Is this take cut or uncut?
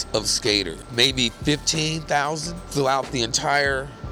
cut